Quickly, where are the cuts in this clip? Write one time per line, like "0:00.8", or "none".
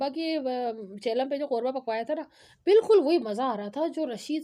none